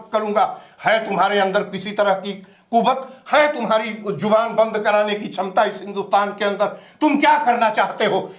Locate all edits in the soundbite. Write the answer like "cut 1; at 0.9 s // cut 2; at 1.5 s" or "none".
none